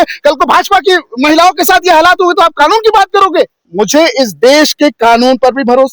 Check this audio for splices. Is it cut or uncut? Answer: cut